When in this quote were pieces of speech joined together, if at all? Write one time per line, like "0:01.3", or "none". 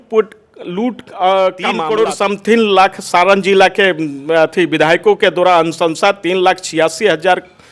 0:01.8